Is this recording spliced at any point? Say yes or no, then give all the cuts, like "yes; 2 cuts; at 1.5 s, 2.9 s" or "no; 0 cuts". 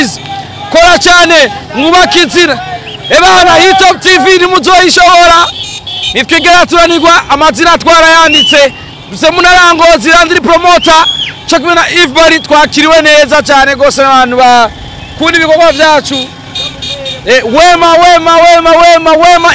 no; 0 cuts